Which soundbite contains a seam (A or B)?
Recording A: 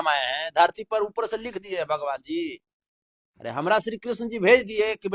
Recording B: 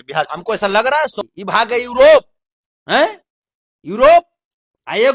B